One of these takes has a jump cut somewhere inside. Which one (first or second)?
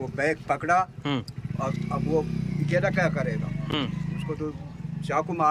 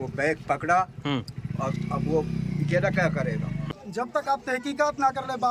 second